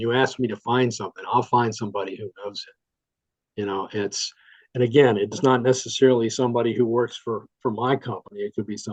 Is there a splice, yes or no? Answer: no